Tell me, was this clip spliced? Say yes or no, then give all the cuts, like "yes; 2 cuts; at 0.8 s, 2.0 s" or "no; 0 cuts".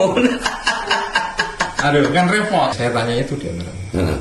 yes; 1 cut; at 2.7 s